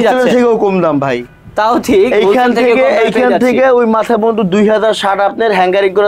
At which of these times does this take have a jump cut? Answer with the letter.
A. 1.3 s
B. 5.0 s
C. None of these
C